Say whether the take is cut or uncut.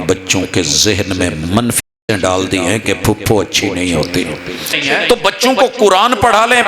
cut